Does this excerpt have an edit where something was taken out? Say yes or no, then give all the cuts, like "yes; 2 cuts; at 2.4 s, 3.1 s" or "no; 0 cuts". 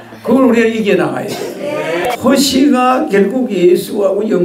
yes; 1 cut; at 2.0 s